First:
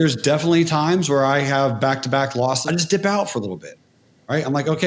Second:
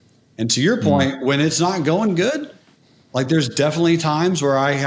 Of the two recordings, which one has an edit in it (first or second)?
first